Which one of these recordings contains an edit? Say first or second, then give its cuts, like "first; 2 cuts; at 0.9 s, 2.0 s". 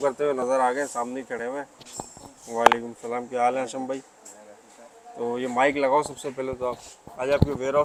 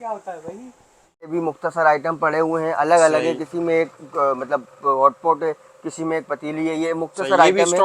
second; 1 cut; at 1.3 s